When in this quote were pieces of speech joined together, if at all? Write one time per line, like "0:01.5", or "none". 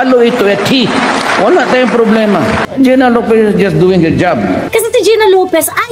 0:02.6
0:04.6